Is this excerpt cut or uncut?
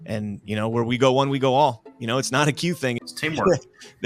cut